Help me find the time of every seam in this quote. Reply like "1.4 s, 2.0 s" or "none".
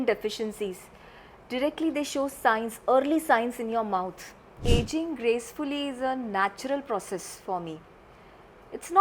4.5 s